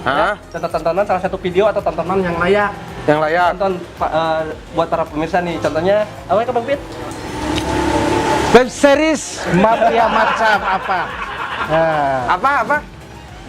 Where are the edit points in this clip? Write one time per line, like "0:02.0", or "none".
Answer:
none